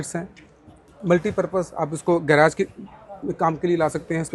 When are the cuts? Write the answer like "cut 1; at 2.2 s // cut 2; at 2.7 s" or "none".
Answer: none